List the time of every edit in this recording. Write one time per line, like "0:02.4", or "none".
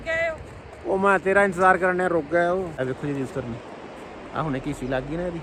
0:02.7